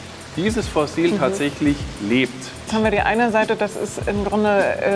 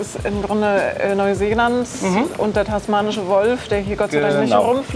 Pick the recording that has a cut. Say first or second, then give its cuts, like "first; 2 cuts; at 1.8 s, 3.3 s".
first; 1 cut; at 2.7 s